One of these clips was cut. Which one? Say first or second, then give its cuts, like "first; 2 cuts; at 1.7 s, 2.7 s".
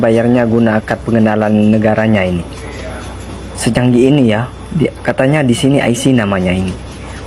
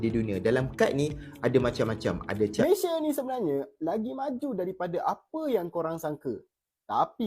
second; 1 cut; at 2.7 s